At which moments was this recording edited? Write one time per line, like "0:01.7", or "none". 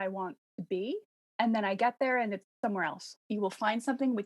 0:01.3
0:03.2